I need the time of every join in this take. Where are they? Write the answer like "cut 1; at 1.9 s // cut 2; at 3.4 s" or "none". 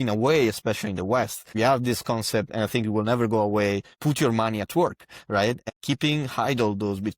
cut 1; at 1.4 s // cut 2; at 3.9 s // cut 3; at 5.6 s